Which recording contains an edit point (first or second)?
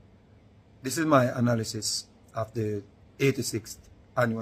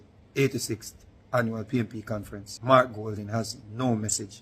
second